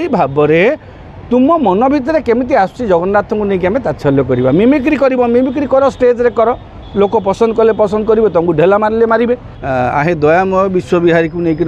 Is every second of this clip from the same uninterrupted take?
no; 1 cut; at 9.5 s

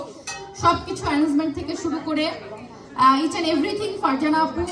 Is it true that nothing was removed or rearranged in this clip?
yes; 0 cuts

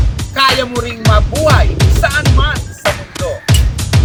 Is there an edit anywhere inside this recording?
no; 0 cuts

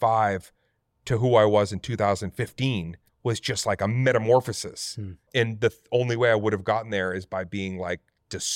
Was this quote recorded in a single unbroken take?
no; 2 cuts; at 3.0 s, 5.3 s

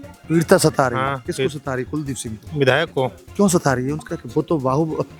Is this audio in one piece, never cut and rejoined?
yes; 0 cuts

